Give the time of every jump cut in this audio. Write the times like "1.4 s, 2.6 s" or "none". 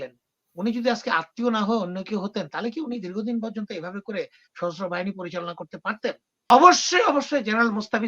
6.5 s

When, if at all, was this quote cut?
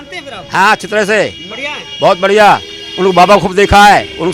none

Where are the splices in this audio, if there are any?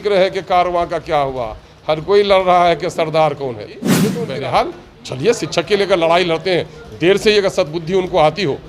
4.0 s

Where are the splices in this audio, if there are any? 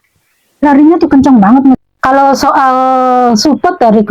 1.8 s

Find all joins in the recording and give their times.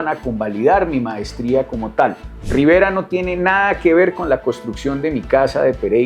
2.3 s

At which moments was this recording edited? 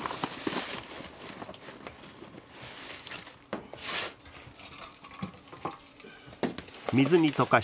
none

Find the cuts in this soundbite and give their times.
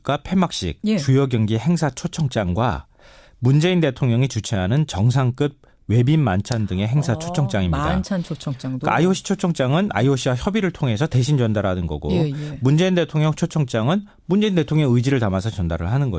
none

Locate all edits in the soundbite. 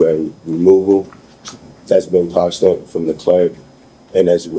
none

